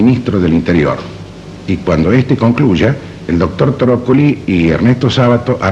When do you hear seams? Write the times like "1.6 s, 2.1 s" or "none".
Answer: 4.8 s

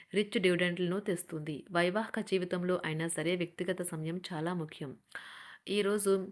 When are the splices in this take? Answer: none

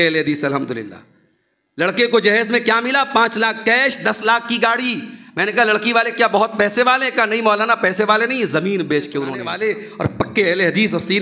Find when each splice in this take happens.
9.5 s

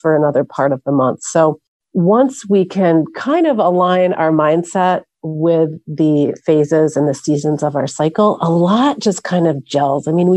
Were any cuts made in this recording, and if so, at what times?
none

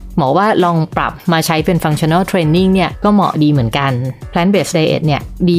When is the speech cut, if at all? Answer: 4.3 s

